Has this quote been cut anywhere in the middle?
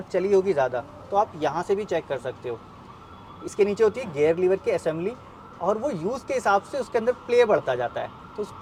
no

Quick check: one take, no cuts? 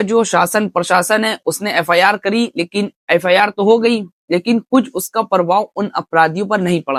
yes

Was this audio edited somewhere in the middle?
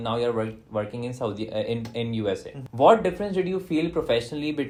no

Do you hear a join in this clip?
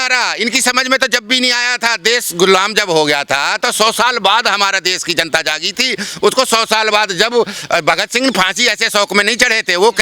no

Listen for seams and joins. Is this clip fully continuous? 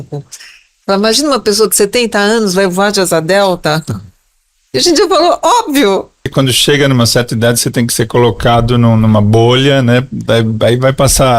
no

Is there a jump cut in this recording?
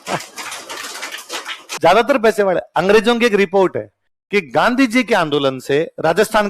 yes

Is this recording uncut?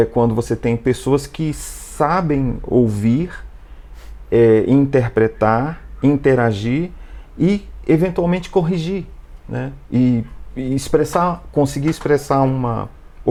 yes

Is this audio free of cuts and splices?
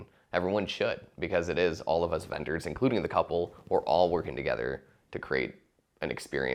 yes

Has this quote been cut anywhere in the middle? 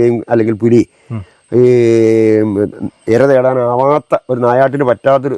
no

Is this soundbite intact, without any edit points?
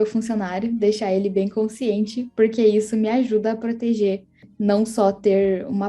no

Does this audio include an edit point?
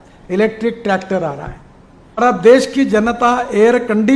yes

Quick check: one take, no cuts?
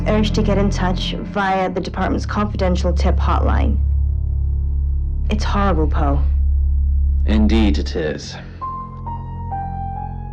no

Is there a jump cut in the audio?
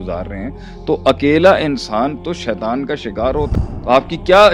yes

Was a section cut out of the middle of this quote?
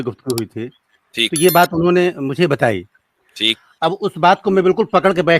yes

